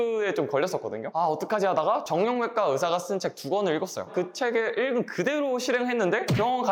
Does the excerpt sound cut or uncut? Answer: cut